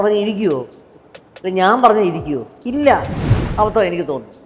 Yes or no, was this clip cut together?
yes